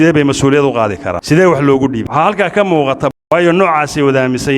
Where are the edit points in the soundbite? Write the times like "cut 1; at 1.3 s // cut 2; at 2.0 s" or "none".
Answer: cut 1; at 1.1 s // cut 2; at 2.1 s // cut 3; at 3.1 s